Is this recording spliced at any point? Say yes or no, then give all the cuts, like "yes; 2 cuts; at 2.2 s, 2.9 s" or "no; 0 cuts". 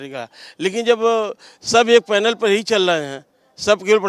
no; 0 cuts